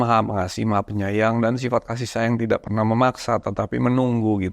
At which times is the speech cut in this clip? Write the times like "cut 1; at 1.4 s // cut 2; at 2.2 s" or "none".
none

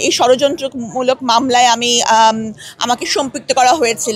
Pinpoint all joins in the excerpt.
none

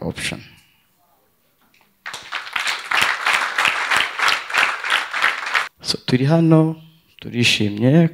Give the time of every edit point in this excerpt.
cut 1; at 5.7 s

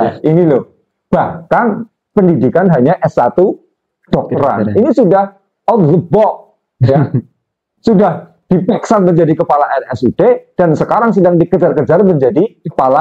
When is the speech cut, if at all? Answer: none

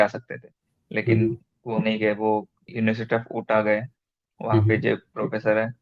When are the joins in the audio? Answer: cut 1; at 2.6 s

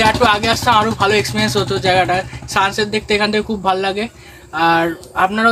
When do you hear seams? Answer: none

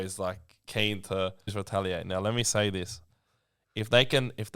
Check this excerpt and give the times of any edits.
cut 1; at 1.5 s

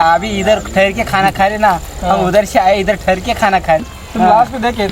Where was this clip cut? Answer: cut 1; at 4.0 s

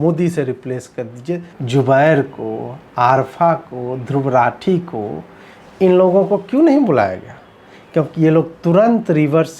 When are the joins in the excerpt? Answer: cut 1; at 1.5 s

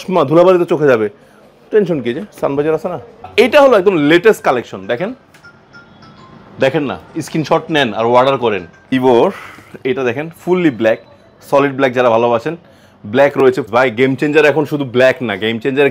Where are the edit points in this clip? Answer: cut 1; at 3.3 s // cut 2; at 8.7 s // cut 3; at 13.6 s

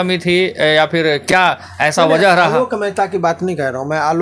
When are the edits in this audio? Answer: none

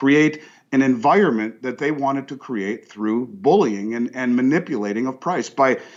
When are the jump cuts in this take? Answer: none

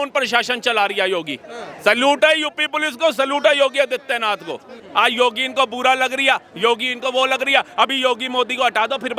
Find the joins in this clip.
cut 1; at 4.8 s

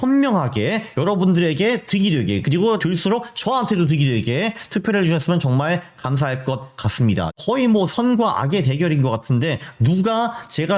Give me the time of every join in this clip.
cut 1; at 7.3 s

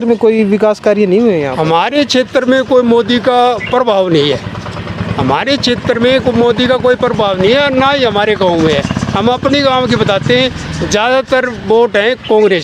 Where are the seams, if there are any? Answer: none

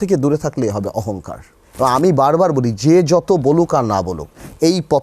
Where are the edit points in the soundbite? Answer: cut 1; at 2.0 s

